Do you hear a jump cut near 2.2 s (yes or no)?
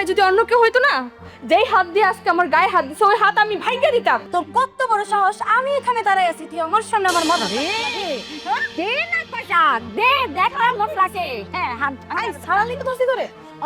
no